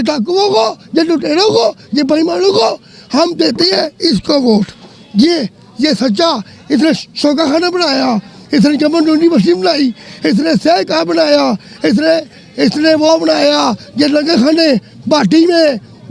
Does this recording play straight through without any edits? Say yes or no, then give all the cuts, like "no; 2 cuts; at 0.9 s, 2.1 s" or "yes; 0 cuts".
yes; 0 cuts